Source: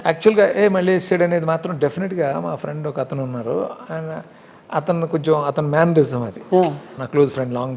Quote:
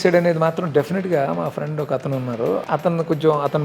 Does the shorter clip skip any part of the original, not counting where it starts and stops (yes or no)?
yes